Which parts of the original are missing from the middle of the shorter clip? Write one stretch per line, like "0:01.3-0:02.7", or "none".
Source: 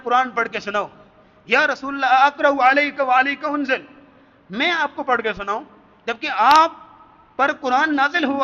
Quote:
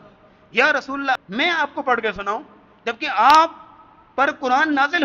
0:02.1-0:04.4